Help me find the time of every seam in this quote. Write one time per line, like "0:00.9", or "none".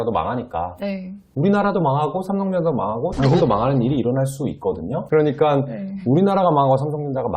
0:05.0

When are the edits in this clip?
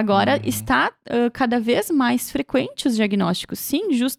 none

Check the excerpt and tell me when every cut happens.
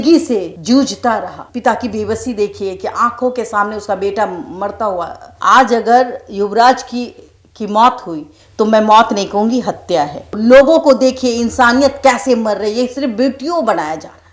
0:01.4
0:05.3
0:10.3

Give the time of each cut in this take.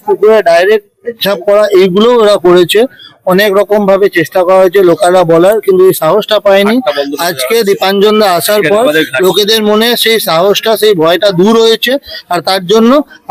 none

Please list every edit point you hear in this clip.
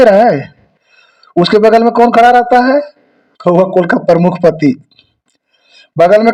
none

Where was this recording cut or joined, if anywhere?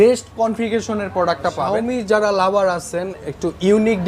0:01.7

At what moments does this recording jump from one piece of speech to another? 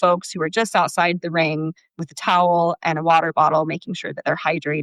0:02.0

